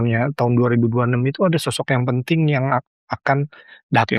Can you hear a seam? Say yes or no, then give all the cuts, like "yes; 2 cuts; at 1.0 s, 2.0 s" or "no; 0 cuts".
no; 0 cuts